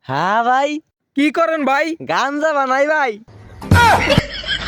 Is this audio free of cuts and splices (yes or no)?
yes